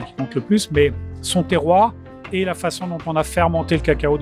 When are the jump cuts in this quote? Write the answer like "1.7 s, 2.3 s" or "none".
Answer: none

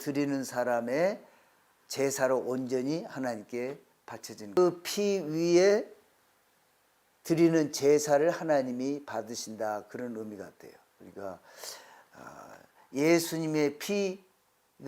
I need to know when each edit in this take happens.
4.6 s

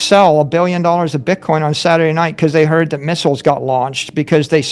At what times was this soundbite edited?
none

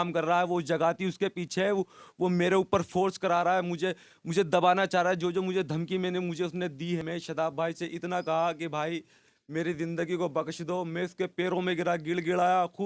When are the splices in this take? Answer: 7.0 s

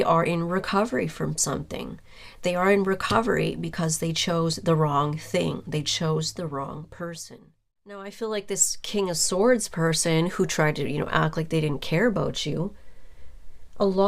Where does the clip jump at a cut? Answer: 8.0 s

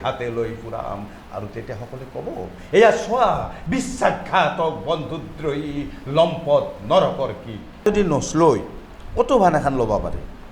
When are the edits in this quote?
7.8 s

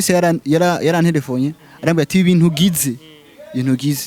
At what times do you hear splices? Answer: none

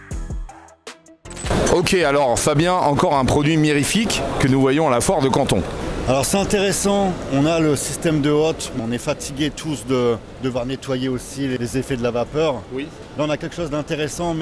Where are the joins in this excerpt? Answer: 1.5 s, 5.8 s, 8.8 s, 10.3 s, 11.6 s

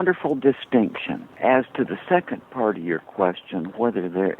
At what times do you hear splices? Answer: 1.4 s

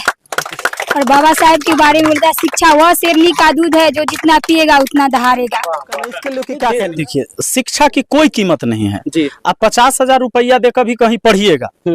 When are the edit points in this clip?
6.3 s

